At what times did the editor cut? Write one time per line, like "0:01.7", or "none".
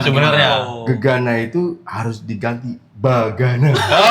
0:02.9